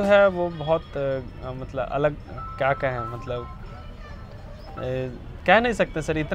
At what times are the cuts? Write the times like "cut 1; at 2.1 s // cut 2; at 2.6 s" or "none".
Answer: none